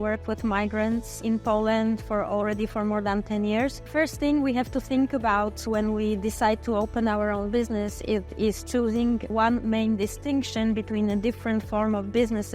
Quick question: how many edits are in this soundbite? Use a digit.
3